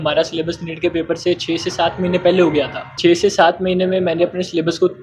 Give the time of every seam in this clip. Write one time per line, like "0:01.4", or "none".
0:03.0